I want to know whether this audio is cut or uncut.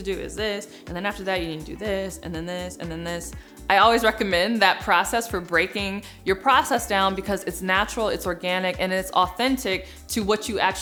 uncut